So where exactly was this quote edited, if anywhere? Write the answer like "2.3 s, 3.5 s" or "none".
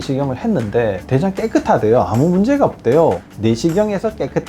3.2 s